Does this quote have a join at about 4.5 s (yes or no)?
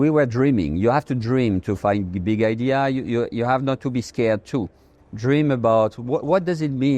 no